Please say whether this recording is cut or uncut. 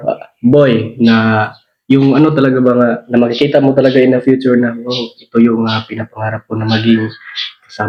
uncut